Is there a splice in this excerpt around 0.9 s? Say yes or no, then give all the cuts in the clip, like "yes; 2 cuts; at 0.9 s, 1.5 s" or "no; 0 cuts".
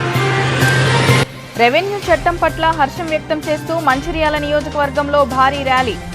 yes; 1 cut; at 0.9 s